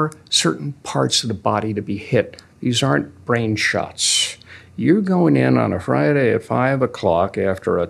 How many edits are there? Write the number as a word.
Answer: zero